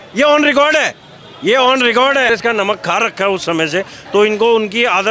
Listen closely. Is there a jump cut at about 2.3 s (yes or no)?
yes